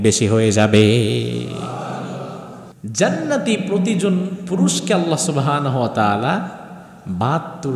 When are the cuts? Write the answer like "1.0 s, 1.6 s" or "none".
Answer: 2.7 s